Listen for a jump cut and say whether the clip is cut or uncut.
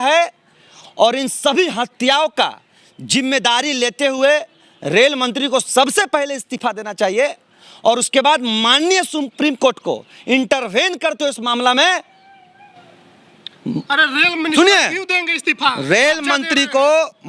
uncut